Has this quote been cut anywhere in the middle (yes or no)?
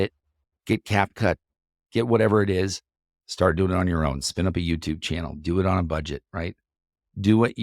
no